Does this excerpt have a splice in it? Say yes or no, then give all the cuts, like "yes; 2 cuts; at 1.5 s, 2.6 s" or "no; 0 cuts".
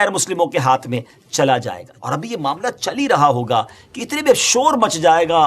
yes; 1 cut; at 1.9 s